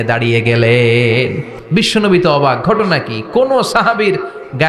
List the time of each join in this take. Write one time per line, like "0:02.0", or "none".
0:01.6